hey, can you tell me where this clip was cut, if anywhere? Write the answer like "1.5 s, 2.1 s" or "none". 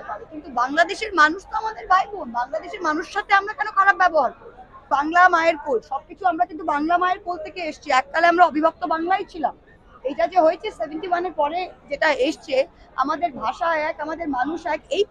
4.8 s